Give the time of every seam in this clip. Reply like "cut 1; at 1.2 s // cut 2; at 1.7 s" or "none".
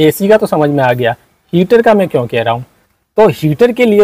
none